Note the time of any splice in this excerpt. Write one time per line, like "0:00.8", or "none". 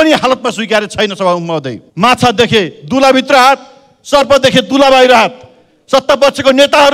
0:01.8